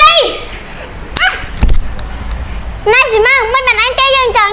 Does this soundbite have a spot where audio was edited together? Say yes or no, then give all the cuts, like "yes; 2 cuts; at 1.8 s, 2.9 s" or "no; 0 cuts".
no; 0 cuts